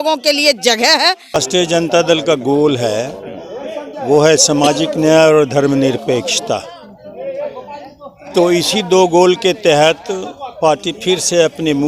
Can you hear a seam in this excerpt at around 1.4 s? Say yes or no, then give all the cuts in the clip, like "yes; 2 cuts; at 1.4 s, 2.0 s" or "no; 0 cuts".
yes; 1 cut; at 1.4 s